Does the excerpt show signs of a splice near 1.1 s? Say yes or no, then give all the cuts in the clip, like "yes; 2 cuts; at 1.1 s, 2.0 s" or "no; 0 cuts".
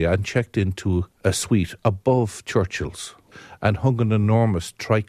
yes; 1 cut; at 1.1 s